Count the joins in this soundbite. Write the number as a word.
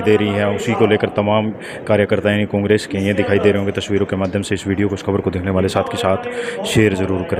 zero